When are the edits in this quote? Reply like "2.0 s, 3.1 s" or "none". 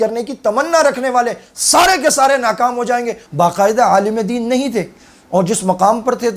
3.2 s